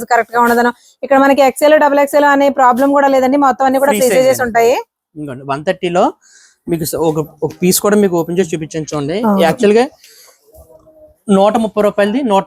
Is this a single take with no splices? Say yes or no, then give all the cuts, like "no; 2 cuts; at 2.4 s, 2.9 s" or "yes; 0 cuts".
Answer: yes; 0 cuts